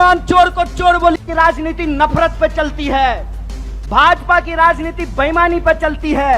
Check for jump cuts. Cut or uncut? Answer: cut